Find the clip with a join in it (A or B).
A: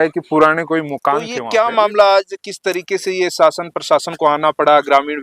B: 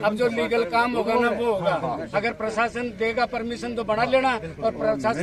A